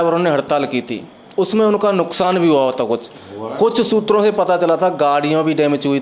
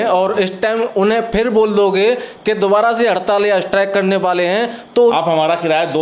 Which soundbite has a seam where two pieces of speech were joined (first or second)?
second